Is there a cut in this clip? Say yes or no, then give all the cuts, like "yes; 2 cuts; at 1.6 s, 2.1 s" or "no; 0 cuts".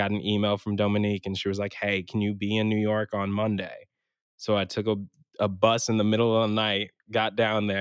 no; 0 cuts